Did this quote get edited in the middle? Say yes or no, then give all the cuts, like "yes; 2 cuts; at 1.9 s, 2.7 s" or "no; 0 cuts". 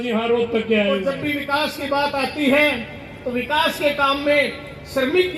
yes; 1 cut; at 1.1 s